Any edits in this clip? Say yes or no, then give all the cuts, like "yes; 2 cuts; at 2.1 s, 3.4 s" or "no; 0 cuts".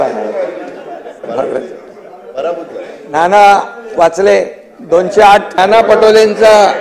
yes; 1 cut; at 5.5 s